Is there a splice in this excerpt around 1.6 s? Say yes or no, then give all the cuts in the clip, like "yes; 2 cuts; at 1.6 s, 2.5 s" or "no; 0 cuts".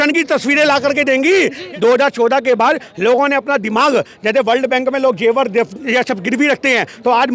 yes; 1 cut; at 1.6 s